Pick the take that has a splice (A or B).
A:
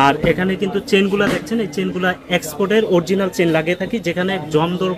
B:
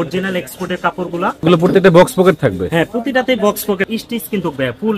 B